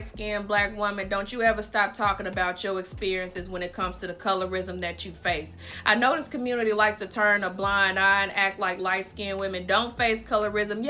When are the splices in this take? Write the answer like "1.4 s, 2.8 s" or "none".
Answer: none